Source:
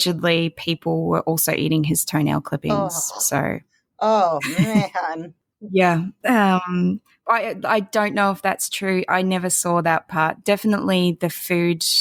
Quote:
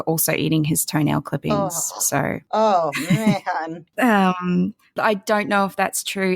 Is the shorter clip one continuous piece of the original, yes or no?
no